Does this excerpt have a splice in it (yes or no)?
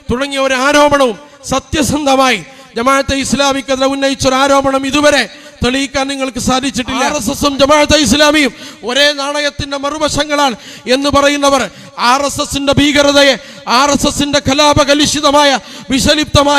yes